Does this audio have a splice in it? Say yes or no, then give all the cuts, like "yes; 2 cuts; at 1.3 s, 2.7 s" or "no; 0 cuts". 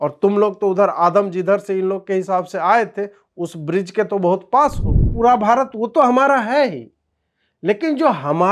yes; 1 cut; at 5.1 s